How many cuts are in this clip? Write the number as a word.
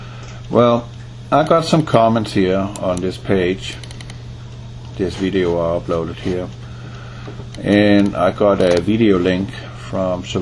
one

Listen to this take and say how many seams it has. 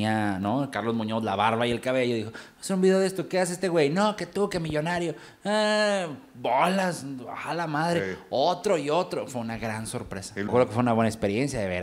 one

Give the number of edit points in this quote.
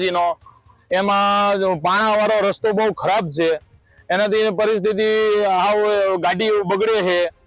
zero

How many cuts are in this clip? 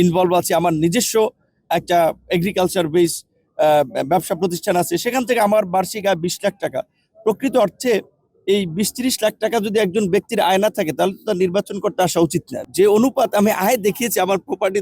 one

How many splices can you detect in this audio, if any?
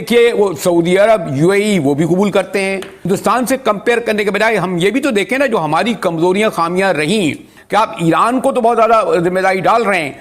two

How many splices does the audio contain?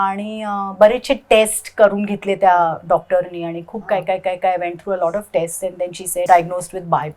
one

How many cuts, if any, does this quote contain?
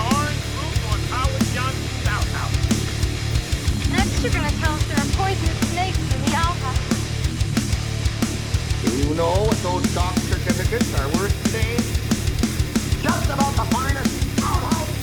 zero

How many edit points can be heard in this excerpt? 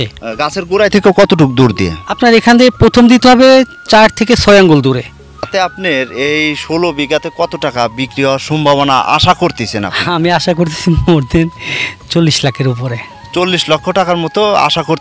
one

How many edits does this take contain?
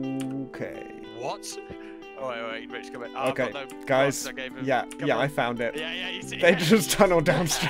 one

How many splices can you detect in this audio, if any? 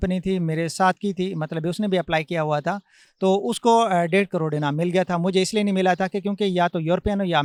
zero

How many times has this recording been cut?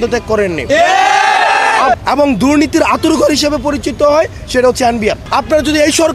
two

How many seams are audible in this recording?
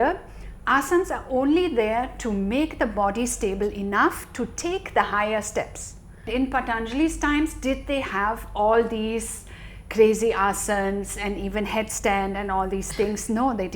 one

